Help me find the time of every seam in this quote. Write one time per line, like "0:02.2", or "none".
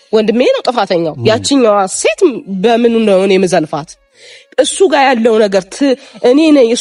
none